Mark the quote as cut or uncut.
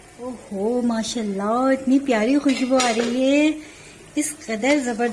uncut